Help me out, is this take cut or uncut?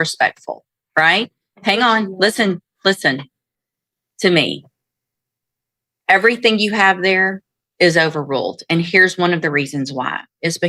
uncut